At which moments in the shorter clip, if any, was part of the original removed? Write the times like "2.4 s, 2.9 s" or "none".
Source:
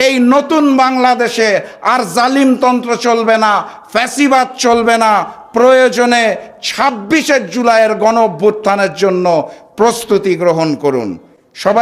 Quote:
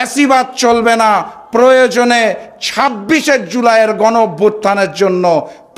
none